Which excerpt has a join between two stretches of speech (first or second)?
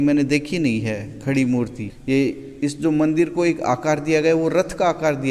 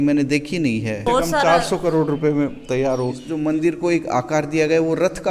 second